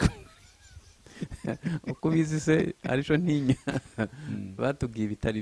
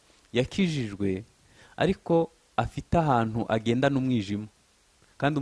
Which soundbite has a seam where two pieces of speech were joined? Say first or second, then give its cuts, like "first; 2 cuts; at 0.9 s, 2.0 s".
first; 1 cut; at 3.8 s